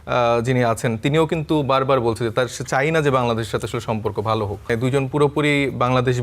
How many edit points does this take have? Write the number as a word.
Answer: one